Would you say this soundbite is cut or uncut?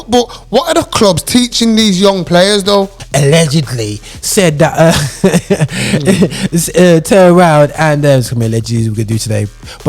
cut